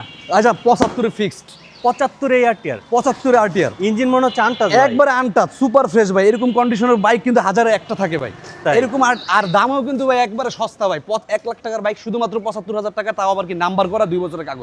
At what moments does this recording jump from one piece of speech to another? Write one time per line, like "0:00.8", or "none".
none